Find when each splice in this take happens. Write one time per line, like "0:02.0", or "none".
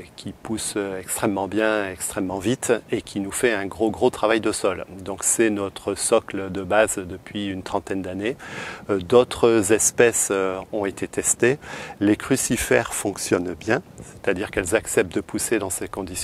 none

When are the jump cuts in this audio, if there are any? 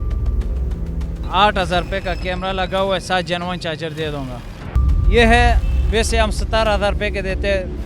0:04.7

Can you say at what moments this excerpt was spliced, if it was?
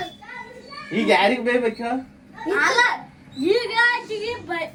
none

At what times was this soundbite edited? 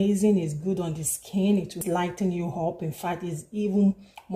0:01.8

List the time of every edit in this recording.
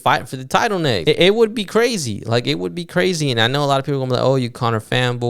0:01.0

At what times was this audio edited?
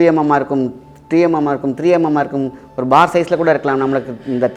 none

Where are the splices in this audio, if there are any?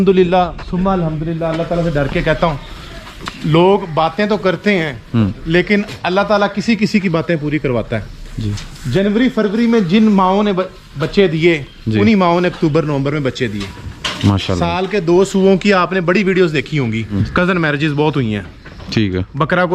0:17.2

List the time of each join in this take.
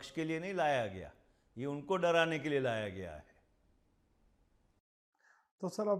none

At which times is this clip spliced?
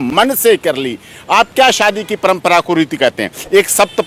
none

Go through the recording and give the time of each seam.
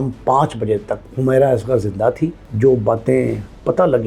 0:01.0
0:02.4

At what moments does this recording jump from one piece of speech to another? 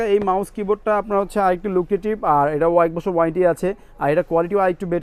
none

